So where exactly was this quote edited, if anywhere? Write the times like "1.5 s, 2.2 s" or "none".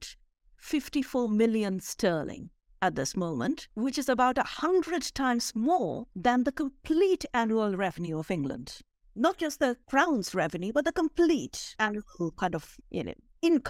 none

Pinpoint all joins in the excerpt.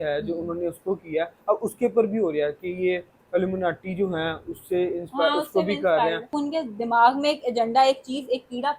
6.3 s

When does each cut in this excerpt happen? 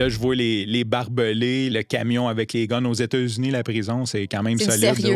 1.7 s

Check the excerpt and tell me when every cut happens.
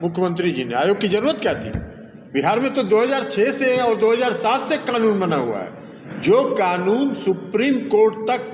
none

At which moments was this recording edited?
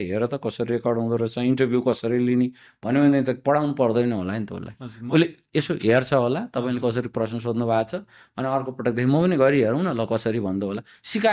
none

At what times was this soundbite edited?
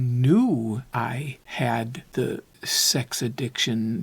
0.9 s, 2.2 s

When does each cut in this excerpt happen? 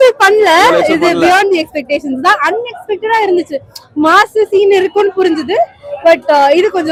none

